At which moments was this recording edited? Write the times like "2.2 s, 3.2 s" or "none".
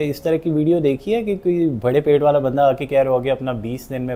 none